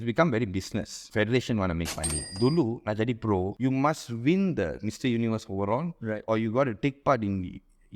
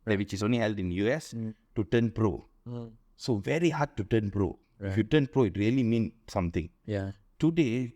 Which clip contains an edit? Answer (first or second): first